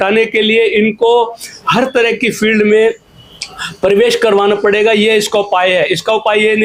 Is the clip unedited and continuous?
yes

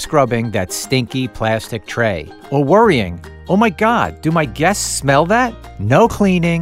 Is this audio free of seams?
no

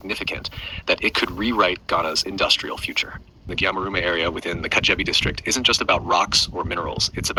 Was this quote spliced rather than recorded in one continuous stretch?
no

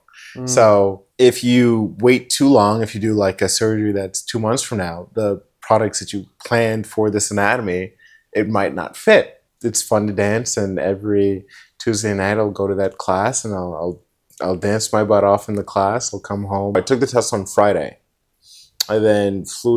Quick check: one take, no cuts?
no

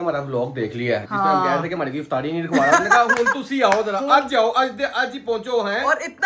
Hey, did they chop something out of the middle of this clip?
no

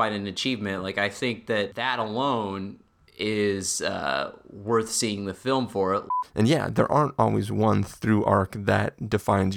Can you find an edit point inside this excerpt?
yes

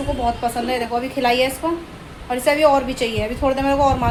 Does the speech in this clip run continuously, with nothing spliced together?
yes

